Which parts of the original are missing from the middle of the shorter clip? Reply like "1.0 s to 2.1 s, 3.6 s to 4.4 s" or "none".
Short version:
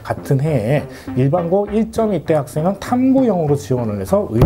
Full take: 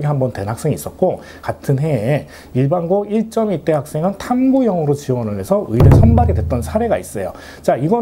none